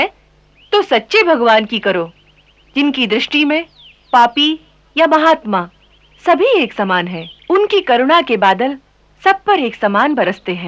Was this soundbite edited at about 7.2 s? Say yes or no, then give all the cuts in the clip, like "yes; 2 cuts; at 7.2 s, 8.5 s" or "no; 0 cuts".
no; 0 cuts